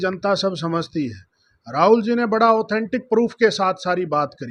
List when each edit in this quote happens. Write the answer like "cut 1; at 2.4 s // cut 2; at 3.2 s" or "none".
none